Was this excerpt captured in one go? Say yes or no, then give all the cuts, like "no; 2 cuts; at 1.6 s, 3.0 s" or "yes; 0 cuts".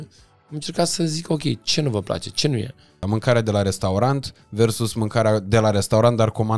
no; 1 cut; at 3.0 s